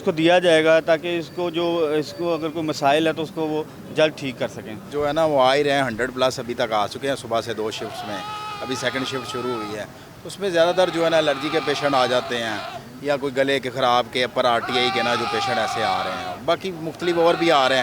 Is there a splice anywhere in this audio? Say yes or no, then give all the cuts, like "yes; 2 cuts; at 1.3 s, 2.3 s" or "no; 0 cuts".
yes; 1 cut; at 4.9 s